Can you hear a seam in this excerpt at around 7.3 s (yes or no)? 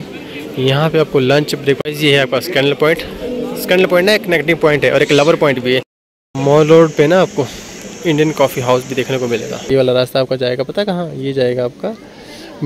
no